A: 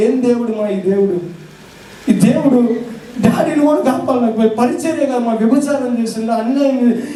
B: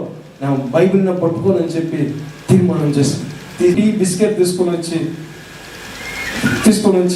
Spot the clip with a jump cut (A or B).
B